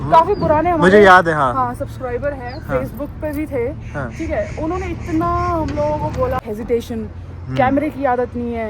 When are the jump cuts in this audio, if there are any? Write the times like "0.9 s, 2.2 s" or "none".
6.4 s